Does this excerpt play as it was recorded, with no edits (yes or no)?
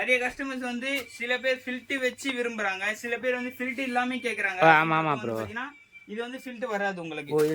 yes